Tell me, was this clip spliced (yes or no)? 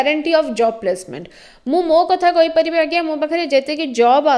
no